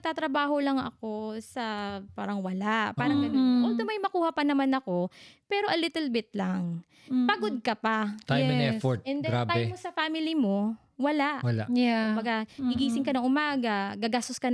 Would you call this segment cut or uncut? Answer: uncut